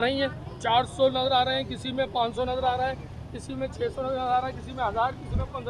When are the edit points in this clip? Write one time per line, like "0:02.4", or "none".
none